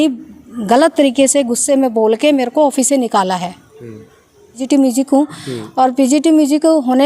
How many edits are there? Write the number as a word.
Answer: one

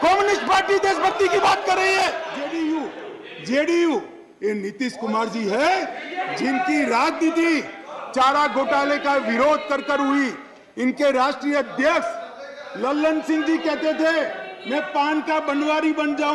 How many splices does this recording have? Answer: one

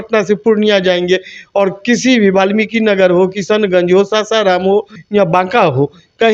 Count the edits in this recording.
one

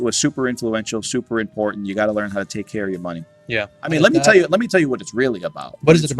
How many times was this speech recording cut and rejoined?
one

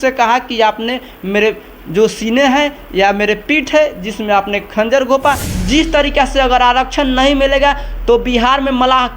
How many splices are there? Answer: one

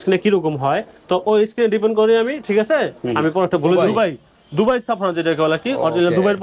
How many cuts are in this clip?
one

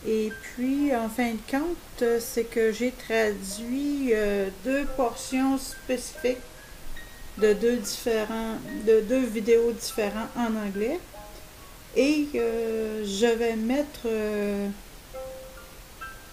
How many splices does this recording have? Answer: one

